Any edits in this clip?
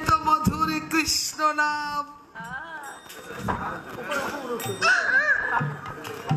no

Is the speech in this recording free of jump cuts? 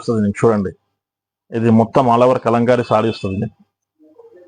yes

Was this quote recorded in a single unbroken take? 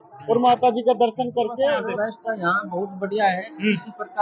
no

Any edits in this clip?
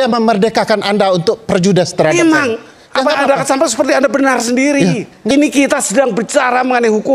yes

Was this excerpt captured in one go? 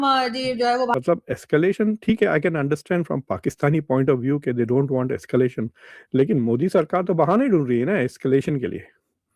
no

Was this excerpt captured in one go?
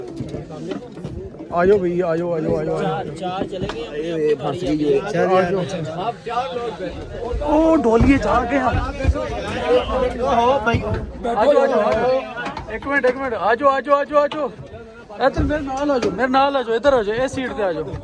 yes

